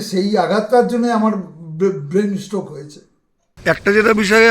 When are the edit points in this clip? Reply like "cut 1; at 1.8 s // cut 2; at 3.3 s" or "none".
cut 1; at 3.6 s